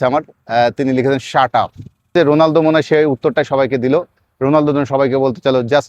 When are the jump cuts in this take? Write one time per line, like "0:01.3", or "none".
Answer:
0:02.1